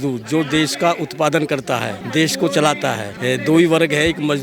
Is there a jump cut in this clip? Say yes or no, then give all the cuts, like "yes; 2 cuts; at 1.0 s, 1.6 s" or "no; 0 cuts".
yes; 2 cuts; at 2.0 s, 3.1 s